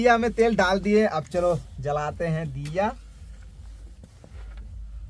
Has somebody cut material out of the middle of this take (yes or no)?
no